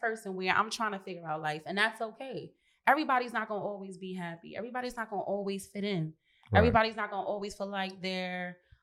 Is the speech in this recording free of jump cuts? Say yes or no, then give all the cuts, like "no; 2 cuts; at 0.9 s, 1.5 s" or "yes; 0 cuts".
yes; 0 cuts